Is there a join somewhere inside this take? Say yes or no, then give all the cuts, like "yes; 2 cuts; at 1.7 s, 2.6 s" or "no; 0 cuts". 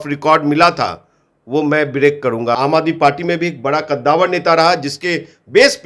yes; 1 cut; at 2.6 s